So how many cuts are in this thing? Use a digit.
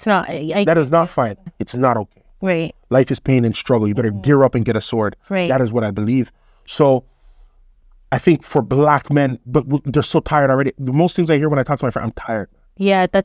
1